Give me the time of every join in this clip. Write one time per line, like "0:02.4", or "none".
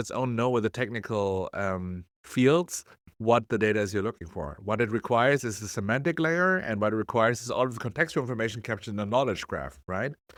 none

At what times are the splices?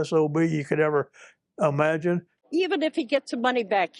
0:02.3

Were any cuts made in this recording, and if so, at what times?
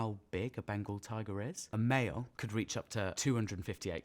0:01.6
0:02.6

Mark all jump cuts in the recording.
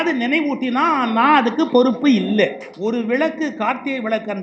0:02.7

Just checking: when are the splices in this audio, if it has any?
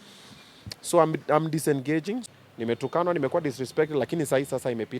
0:02.3

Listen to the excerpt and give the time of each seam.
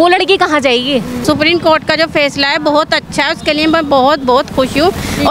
0:01.2

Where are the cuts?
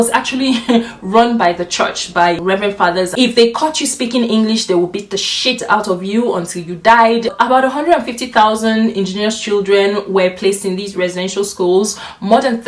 0:03.1
0:07.3

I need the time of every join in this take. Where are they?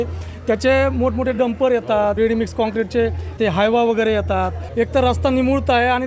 0:02.2
0:03.4
0:04.6

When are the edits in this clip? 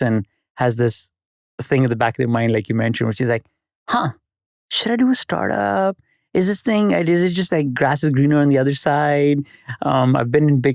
none

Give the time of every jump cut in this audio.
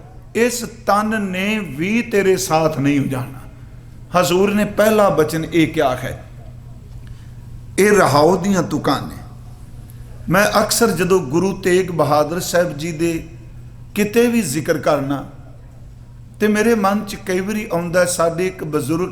none

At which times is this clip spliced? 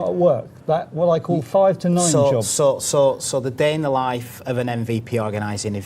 0:02.0

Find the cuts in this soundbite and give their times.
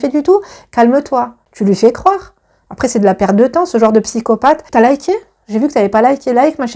0:01.4
0:04.6

